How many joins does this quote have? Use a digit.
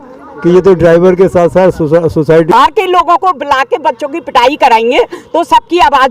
1